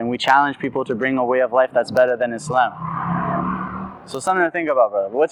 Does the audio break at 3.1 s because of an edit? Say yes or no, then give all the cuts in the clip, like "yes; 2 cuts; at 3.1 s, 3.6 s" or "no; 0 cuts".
no; 0 cuts